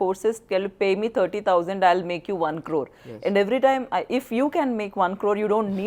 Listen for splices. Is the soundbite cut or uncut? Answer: uncut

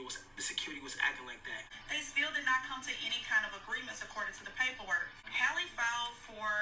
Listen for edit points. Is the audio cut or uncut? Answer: cut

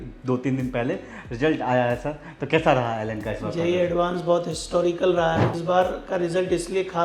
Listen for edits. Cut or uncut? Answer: cut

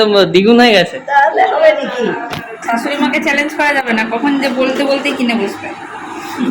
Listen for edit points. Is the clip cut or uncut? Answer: cut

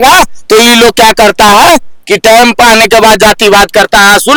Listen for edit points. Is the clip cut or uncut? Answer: uncut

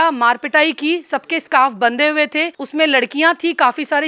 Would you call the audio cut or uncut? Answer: cut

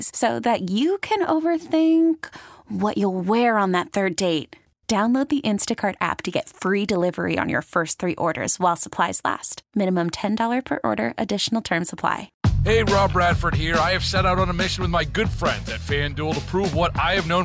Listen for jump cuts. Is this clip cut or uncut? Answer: cut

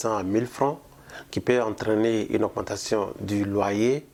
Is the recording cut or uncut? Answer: uncut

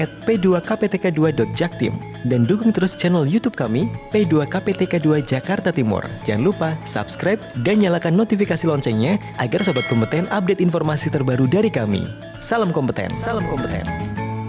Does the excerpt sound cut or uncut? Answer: uncut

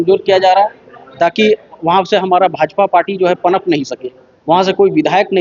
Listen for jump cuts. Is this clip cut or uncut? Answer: uncut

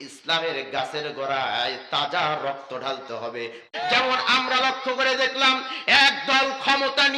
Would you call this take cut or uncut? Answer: cut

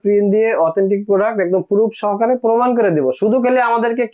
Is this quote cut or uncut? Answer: uncut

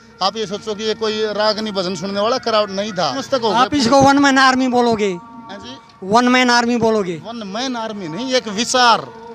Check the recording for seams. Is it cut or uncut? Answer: cut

